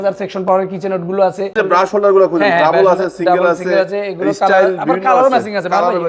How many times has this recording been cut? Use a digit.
1